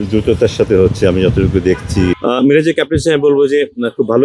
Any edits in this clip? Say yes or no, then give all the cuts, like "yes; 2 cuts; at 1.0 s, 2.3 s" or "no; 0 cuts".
yes; 1 cut; at 2.2 s